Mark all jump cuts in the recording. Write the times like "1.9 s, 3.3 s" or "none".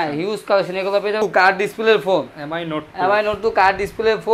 1.2 s